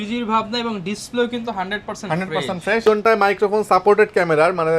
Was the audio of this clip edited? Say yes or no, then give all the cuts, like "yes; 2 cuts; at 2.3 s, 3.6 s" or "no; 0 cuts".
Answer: yes; 1 cut; at 2.8 s